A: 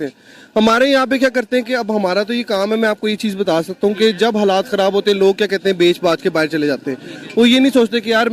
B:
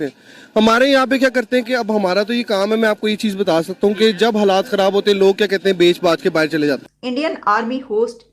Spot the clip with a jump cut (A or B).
B